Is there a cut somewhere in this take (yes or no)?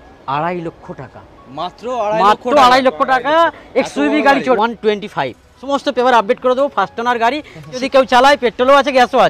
yes